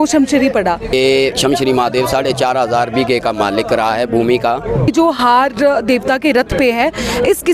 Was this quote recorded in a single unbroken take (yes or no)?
no